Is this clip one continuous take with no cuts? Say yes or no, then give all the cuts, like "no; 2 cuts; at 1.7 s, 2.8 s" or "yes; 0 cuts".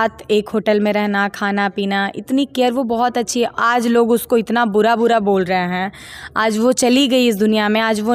yes; 0 cuts